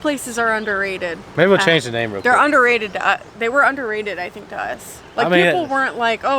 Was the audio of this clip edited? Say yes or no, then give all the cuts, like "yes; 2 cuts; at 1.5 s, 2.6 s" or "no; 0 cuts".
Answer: yes; 1 cut; at 1.2 s